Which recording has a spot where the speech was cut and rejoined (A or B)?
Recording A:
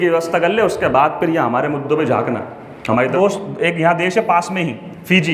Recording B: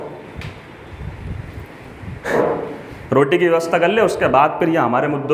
A